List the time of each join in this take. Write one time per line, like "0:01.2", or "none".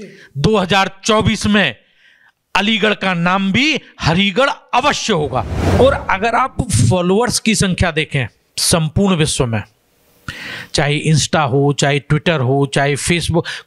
0:05.6